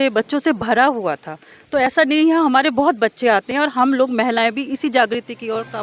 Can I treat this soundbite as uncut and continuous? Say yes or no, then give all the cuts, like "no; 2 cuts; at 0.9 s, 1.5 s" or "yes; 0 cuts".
yes; 0 cuts